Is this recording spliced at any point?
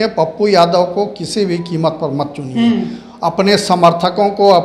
no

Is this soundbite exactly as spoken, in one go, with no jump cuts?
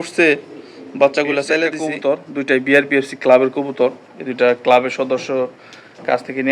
no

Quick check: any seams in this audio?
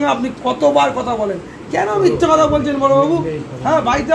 no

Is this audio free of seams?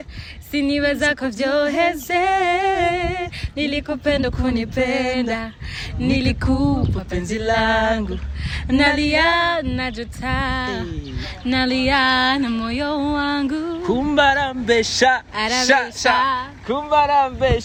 yes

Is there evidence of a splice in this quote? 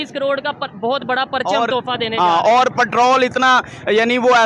no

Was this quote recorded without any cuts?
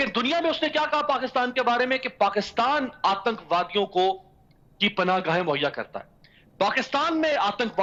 yes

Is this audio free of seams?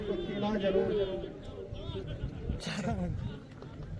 yes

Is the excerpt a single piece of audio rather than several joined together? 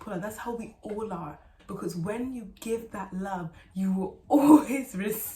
no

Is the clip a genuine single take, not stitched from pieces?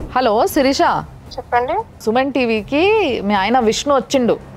yes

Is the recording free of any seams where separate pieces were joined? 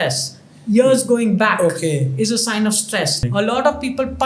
no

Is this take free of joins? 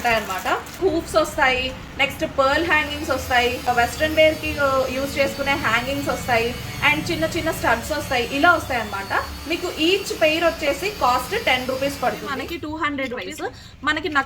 no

